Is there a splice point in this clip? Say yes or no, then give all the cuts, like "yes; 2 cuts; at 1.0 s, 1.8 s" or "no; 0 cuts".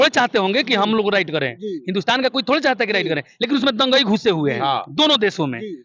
no; 0 cuts